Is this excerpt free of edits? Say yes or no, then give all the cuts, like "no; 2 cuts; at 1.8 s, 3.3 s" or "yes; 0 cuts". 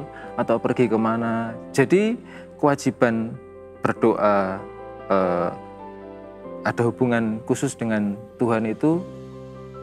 yes; 0 cuts